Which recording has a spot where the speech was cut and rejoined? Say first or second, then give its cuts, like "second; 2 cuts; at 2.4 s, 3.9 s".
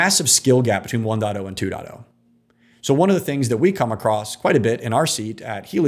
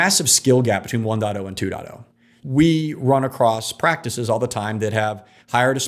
second; 1 cut; at 2.3 s